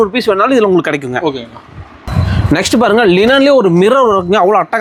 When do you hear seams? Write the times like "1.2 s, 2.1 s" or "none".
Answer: none